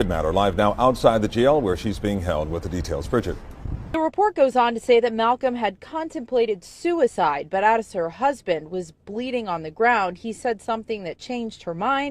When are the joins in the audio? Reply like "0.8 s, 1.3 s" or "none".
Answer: 3.7 s